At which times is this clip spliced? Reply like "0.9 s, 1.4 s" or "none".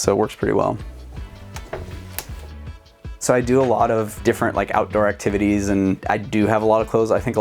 none